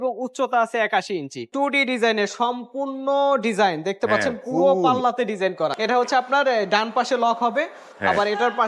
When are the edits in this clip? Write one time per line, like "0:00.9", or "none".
0:01.5
0:05.7